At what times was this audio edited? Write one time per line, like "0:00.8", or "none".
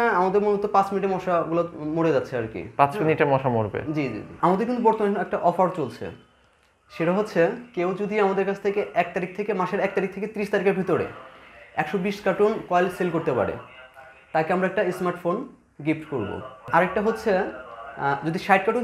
0:04.2
0:16.6

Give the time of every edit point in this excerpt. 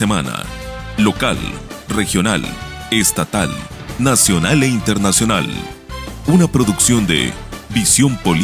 none

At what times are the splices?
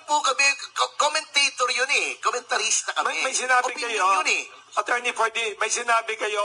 none

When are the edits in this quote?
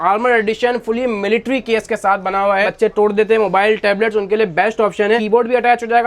0:02.7
0:05.2

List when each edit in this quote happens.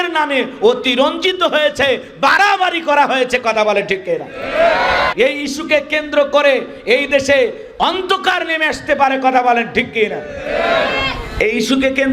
0:05.1

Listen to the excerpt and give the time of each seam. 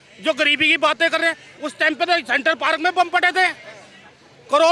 0:01.5

